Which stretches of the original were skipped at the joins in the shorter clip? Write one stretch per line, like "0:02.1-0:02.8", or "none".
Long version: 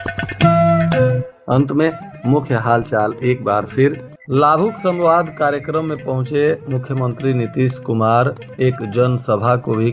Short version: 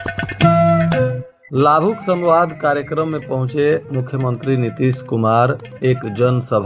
0:01.3-0:04.1